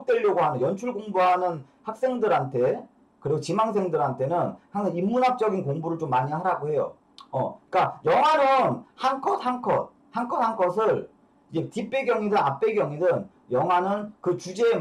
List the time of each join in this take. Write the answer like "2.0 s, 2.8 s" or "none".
7.0 s